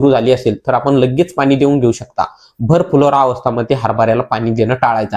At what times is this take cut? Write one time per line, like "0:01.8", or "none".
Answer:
none